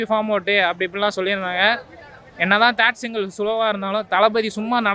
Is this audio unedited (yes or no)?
yes